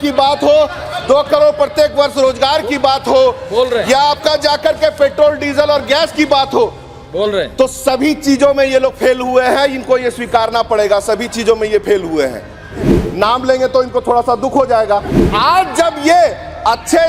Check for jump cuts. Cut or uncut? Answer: cut